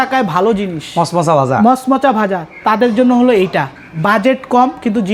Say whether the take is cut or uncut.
uncut